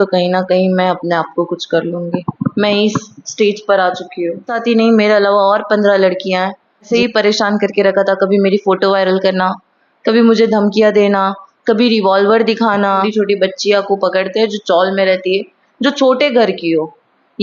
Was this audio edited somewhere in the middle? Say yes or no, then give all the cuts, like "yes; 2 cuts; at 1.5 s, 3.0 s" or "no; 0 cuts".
yes; 3 cuts; at 4.5 s, 6.9 s, 13.1 s